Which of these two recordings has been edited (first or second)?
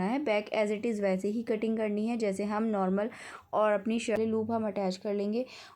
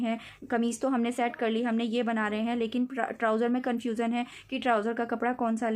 first